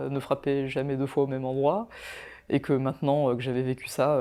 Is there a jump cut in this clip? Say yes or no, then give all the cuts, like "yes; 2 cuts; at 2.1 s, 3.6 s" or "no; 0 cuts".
no; 0 cuts